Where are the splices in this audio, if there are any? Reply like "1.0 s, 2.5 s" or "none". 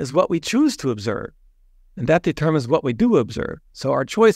none